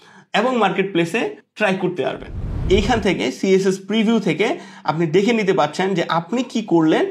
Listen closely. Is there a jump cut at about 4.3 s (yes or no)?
no